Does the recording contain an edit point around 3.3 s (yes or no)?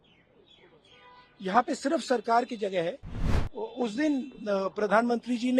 yes